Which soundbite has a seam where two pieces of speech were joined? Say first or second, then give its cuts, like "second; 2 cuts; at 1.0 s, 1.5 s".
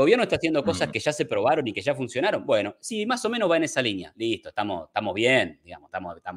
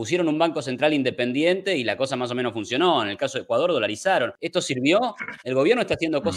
second; 1 cut; at 4.4 s